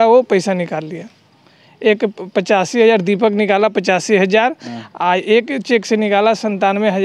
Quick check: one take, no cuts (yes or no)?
yes